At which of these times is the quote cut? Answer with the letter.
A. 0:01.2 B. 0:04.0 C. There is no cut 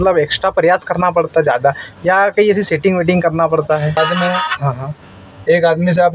B